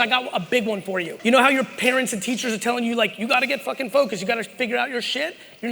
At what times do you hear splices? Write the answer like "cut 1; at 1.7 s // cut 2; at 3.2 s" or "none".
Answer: cut 1; at 1.1 s

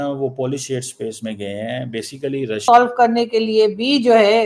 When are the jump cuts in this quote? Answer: cut 1; at 2.7 s

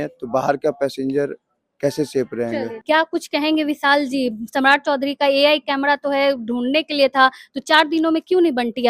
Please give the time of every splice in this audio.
cut 1; at 2.7 s

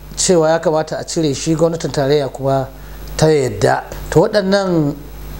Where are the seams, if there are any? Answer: cut 1; at 3.9 s

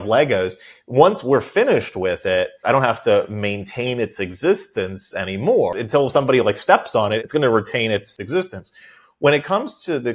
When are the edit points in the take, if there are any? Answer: cut 1; at 2.6 s // cut 2; at 5.8 s // cut 3; at 7.2 s // cut 4; at 8.2 s

